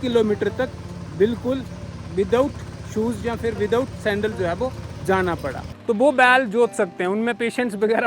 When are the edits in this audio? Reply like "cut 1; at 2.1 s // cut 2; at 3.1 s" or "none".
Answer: cut 1; at 5.7 s